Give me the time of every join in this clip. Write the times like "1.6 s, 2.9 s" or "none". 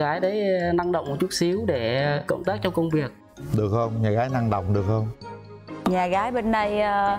none